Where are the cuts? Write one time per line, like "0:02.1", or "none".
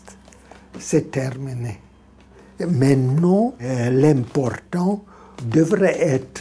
0:02.4
0:03.7
0:05.4